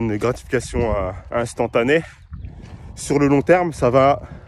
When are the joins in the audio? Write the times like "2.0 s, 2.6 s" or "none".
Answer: 1.2 s